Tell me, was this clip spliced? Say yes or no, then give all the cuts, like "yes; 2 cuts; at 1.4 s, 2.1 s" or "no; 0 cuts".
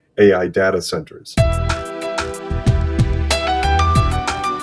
yes; 1 cut; at 1.2 s